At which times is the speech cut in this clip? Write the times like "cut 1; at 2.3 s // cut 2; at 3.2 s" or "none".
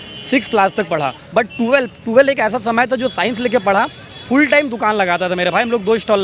cut 1; at 1.2 s